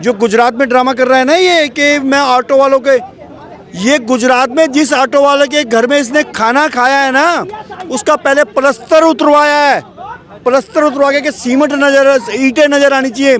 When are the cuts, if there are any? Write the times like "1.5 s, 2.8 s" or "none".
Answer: none

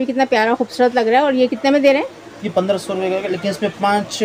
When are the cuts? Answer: none

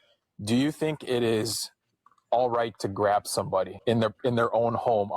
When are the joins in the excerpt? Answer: 3.8 s

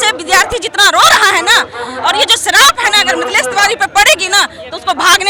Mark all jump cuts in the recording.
none

